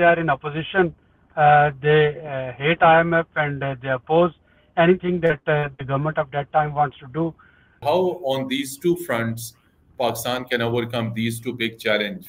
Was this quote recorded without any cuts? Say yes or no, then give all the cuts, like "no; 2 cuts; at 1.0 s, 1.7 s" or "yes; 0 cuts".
no; 1 cut; at 7.8 s